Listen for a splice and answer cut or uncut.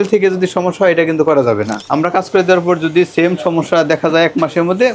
cut